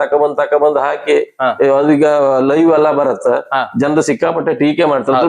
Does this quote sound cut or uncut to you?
uncut